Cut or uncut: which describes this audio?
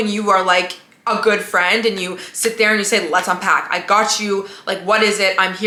uncut